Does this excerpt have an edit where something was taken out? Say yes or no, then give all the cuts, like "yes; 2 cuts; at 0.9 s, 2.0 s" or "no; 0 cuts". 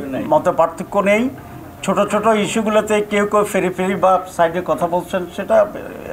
no; 0 cuts